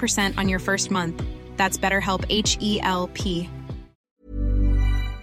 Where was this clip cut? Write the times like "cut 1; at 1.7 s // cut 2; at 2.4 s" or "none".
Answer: cut 1; at 4.1 s